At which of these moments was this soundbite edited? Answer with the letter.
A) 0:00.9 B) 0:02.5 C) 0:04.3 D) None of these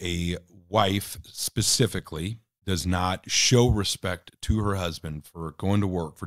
B